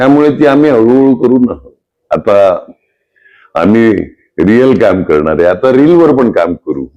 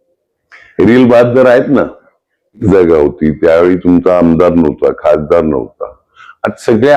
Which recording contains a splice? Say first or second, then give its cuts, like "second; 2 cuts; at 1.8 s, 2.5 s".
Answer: second; 1 cut; at 2.6 s